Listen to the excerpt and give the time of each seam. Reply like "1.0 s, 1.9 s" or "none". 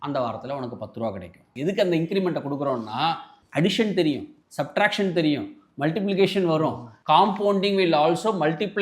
1.5 s, 6.9 s